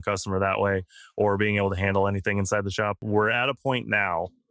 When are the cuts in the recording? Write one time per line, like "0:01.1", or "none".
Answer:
0:03.0